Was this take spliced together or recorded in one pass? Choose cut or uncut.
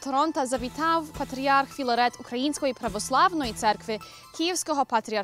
uncut